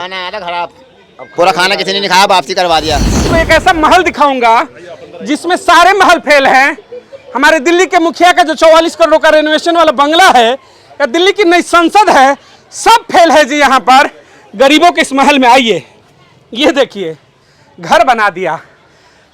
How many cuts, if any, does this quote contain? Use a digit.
1